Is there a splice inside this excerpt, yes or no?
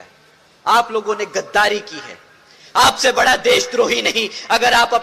no